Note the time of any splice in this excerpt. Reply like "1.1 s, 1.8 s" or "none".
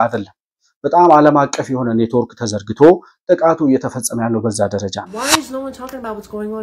5.1 s

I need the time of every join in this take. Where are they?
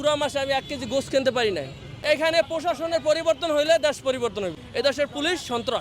1.8 s, 4.6 s

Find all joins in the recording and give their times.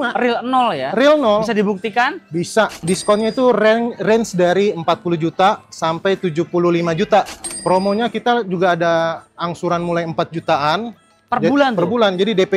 2.8 s, 7.4 s

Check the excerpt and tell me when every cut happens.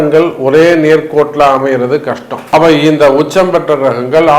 2.3 s

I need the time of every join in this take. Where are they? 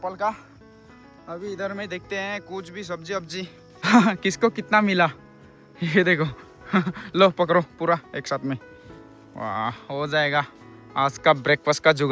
3.6 s

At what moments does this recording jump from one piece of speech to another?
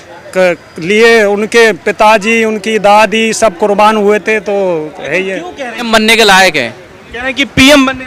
5.9 s

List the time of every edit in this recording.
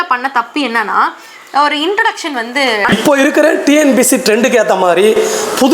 2.9 s

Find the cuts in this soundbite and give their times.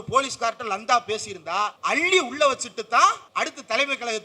1.8 s, 3.2 s

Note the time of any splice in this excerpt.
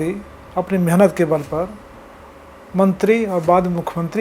none

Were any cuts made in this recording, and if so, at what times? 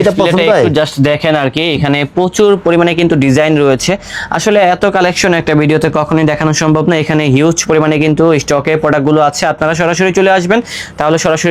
none

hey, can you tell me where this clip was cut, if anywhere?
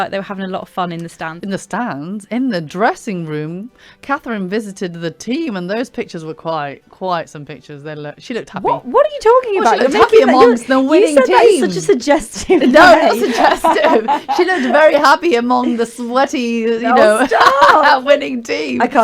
1.3 s

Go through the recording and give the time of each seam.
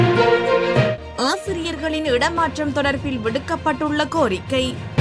0.9 s

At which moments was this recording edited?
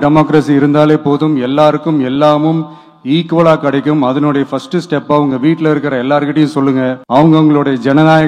7.0 s

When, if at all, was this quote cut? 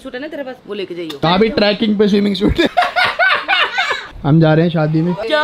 1.3 s, 2.7 s, 4.1 s

